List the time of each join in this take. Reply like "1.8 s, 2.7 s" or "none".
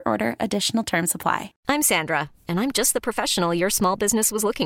1.5 s